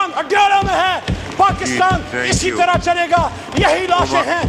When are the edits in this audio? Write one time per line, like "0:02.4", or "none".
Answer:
none